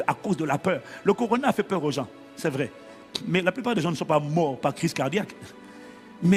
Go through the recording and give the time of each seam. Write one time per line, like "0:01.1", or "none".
none